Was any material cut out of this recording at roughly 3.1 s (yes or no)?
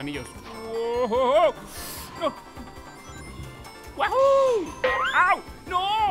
yes